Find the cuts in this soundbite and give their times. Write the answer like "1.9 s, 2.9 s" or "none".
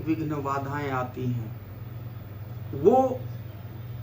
none